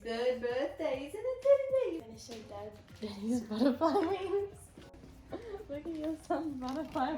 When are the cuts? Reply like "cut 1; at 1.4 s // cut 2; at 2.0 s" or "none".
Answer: cut 1; at 2.1 s // cut 2; at 5.1 s